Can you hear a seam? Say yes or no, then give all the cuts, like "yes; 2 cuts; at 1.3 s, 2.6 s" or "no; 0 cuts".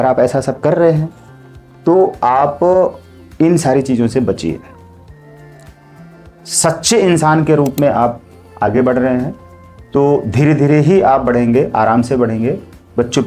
no; 0 cuts